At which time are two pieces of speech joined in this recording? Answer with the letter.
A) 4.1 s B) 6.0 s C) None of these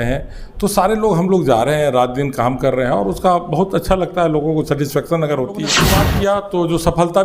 B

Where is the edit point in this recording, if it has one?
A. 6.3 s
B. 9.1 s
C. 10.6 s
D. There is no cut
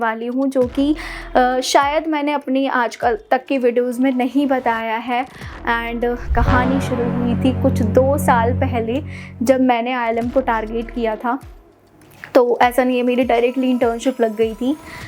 A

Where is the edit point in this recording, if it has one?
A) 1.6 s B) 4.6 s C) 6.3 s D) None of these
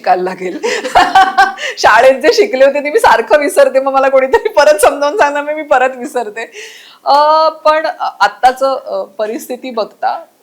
D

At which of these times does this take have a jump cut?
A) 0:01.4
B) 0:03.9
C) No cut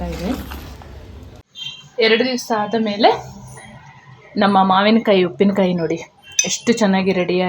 A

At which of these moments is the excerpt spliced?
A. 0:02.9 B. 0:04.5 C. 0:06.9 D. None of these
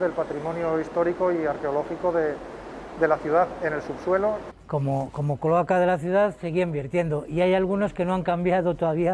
B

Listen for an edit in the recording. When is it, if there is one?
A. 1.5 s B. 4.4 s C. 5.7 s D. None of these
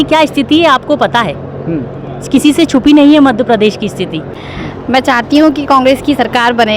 B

